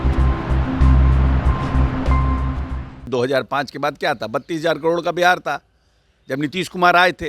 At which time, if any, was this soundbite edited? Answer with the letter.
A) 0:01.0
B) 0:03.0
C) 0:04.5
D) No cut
B